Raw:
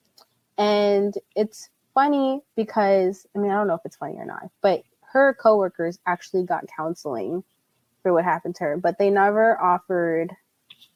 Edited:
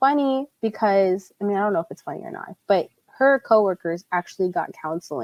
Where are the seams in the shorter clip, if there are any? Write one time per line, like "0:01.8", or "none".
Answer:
none

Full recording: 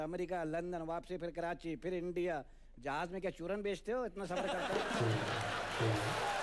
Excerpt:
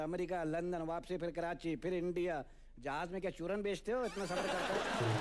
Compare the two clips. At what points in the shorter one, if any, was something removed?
none

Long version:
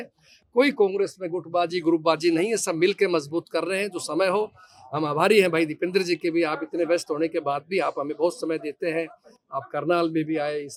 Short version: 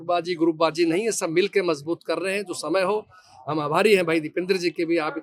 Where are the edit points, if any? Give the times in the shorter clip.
none

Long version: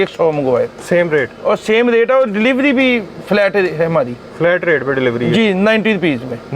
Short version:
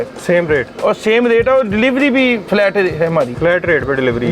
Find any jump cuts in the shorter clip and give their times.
0:02.4
0:03.3

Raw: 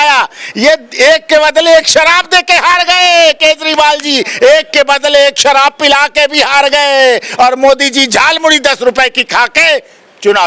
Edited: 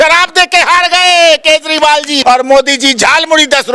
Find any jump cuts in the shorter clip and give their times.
0:02.1

